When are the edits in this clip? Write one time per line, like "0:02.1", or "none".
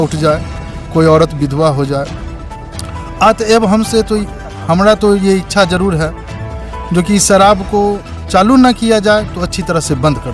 none

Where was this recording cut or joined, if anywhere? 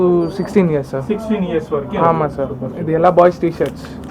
none

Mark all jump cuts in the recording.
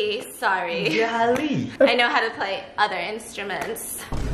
none

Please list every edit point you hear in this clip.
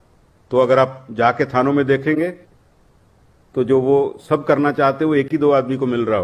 none

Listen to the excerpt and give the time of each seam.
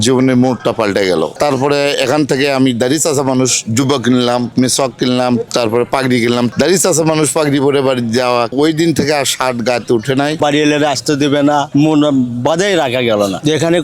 0:01.3
0:06.5
0:08.5
0:10.4

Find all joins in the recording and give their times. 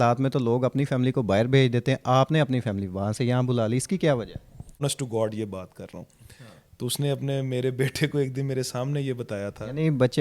0:04.8

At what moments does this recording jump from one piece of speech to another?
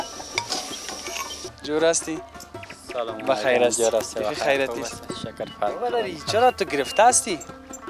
0:01.5

